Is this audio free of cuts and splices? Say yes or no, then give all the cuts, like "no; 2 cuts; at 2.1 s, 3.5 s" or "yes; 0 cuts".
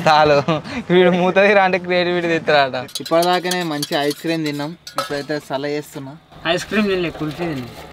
no; 1 cut; at 2.9 s